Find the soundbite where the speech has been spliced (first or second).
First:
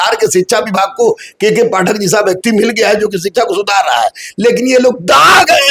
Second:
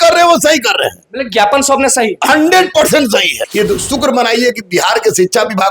second